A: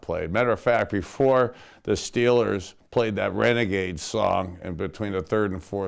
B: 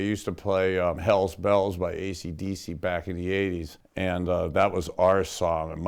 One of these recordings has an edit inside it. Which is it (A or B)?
B